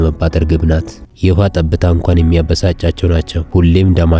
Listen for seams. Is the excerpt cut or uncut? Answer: cut